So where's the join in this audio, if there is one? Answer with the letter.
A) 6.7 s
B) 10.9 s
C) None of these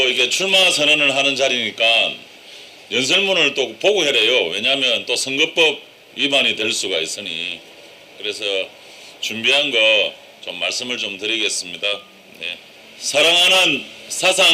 A